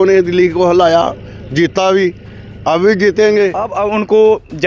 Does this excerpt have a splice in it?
yes; 1 cut; at 3.7 s

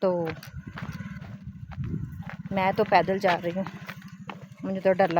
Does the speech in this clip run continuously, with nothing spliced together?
yes; 0 cuts

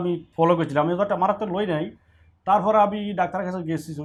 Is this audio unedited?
yes; 0 cuts

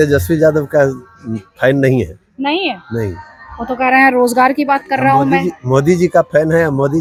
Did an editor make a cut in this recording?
no; 0 cuts

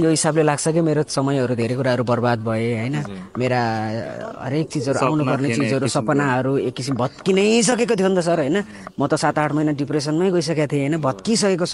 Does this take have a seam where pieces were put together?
no; 0 cuts

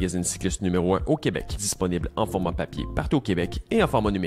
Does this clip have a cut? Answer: yes; 1 cut; at 1.5 s

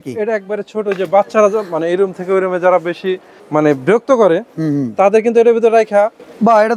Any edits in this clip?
no; 0 cuts

